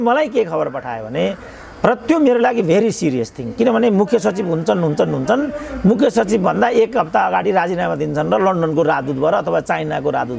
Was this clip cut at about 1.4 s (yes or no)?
no